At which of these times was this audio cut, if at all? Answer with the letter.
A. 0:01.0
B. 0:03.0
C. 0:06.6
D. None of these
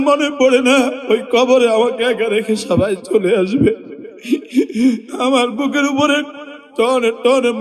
A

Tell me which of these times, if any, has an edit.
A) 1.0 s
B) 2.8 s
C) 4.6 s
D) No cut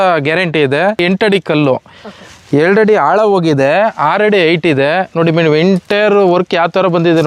A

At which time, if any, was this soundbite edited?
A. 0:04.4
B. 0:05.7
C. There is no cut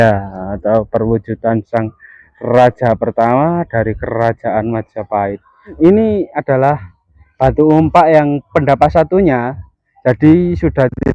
B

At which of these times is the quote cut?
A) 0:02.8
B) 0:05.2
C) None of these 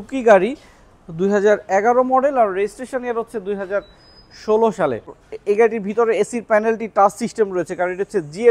B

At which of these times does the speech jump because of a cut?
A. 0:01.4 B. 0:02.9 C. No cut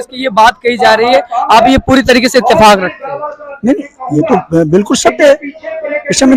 C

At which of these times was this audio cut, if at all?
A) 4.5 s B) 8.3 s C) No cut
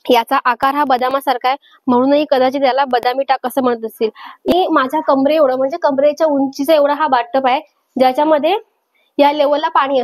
A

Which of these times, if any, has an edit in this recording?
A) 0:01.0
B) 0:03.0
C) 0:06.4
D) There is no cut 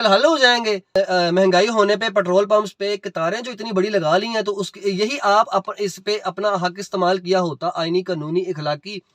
A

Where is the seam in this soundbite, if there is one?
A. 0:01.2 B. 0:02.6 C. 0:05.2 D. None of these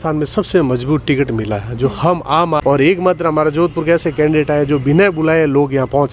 B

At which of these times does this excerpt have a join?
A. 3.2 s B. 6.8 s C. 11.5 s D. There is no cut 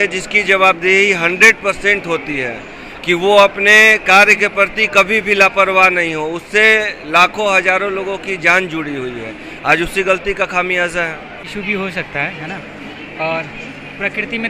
C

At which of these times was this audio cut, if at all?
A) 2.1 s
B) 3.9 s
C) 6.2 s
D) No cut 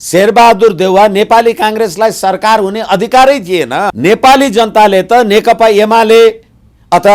B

